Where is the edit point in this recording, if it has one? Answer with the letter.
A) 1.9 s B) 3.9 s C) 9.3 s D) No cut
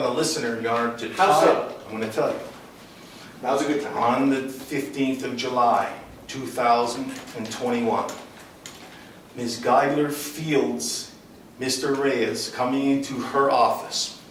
D